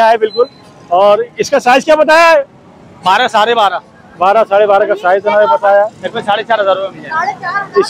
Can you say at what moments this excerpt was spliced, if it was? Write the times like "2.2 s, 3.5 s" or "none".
none

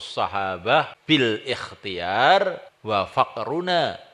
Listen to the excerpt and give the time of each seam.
0.9 s, 2.7 s

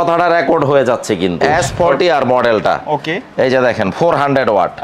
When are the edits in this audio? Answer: 1.5 s

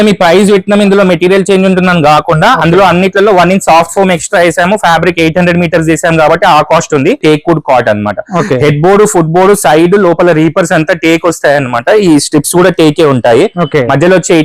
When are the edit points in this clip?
7.2 s

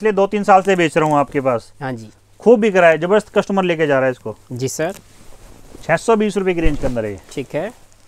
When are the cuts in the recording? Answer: none

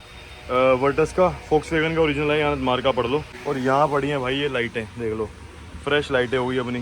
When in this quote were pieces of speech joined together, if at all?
3.3 s

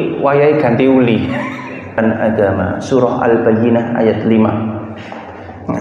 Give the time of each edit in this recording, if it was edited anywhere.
2.0 s

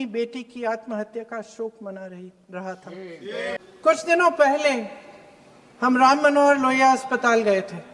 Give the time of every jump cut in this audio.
3.6 s

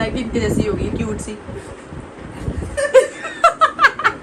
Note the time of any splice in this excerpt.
none

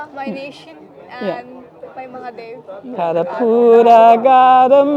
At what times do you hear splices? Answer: 2.7 s

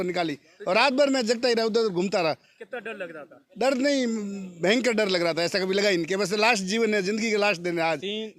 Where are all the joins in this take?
none

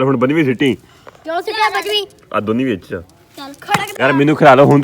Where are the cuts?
3.9 s

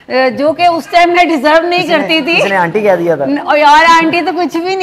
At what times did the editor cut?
none

